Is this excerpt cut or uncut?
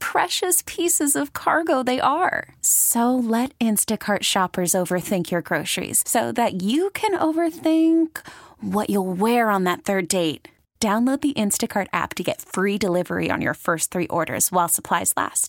uncut